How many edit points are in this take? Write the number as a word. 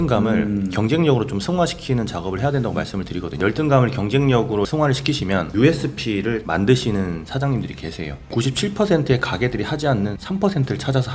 five